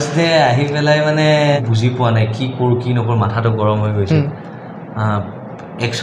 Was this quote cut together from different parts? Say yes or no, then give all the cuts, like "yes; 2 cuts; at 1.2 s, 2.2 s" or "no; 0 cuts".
yes; 1 cut; at 1.6 s